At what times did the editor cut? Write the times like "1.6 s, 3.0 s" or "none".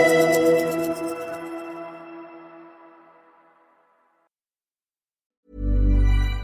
none